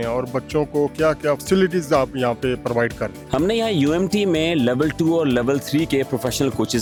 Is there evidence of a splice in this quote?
no; 0 cuts

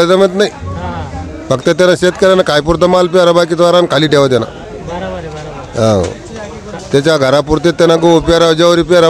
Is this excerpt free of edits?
yes; 0 cuts

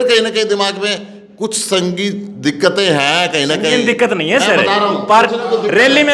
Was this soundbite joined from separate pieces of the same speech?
no; 0 cuts

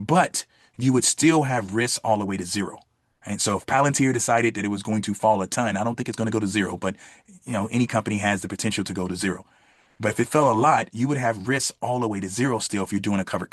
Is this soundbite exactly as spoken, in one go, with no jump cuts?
yes; 0 cuts

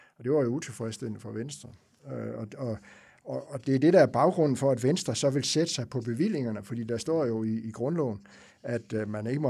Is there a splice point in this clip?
no; 0 cuts

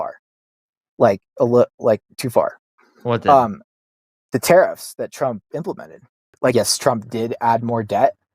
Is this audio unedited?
no; 1 cut; at 6.5 s

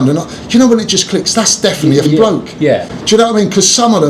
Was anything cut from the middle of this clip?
yes; 1 cut; at 2.0 s

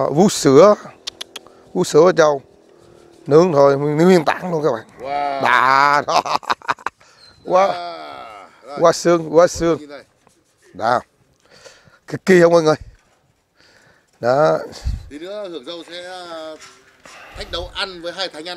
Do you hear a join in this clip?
no; 0 cuts

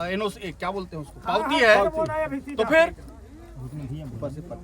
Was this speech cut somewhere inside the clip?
no; 0 cuts

